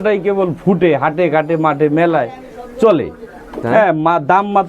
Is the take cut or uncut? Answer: cut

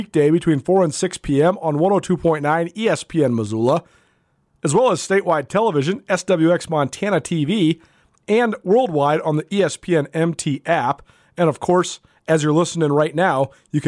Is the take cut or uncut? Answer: uncut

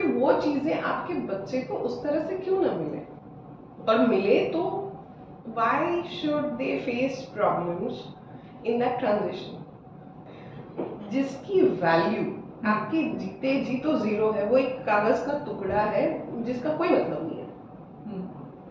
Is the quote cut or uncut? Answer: cut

